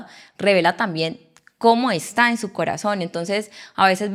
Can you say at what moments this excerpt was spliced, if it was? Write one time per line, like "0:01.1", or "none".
none